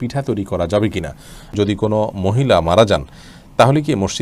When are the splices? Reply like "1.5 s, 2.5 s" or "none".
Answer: 1.5 s